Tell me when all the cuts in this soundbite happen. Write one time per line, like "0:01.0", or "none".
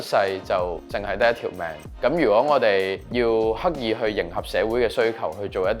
0:00.8
0:01.8
0:03.0